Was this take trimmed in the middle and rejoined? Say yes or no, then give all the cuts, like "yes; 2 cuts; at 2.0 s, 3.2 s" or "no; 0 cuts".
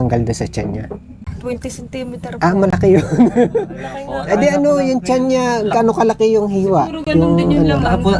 yes; 1 cut; at 1.2 s